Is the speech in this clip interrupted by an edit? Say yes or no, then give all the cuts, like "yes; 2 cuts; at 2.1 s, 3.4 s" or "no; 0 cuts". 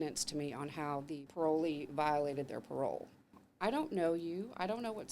yes; 2 cuts; at 1.3 s, 3.4 s